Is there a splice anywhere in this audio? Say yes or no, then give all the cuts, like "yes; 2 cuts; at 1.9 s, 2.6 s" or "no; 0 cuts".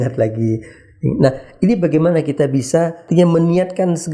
yes; 1 cut; at 3.0 s